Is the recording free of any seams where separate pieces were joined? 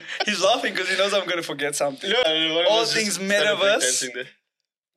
no; 1 cut; at 2.2 s

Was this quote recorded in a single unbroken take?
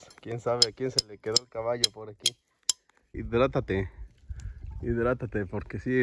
no; 1 cut; at 3.1 s

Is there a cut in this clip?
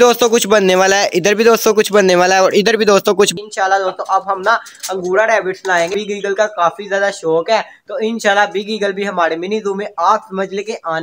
yes; 2 cuts; at 3.3 s, 5.9 s

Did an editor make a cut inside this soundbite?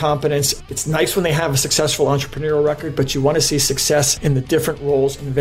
no; 0 cuts

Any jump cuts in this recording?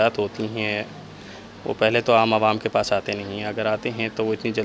no; 0 cuts

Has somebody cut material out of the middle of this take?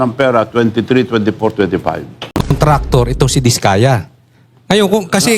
yes; 1 cut; at 2.5 s

